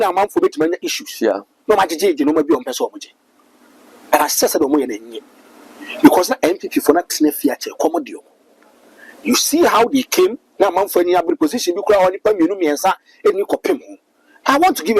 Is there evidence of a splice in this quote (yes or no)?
no